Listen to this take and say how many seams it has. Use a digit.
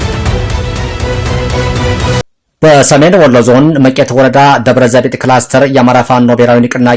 1